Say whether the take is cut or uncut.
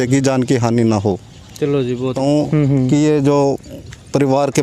cut